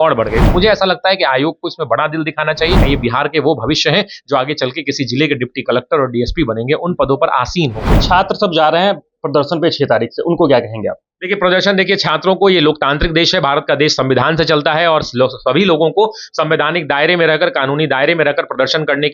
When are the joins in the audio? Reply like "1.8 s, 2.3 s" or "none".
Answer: 2.8 s, 8.0 s